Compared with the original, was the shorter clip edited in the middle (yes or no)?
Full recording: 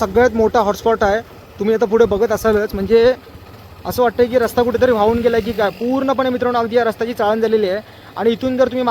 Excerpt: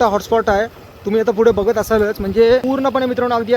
yes